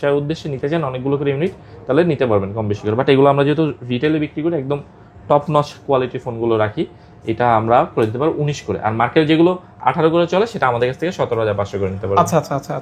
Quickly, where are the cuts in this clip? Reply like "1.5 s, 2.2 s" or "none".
none